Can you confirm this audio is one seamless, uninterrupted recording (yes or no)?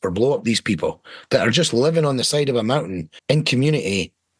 no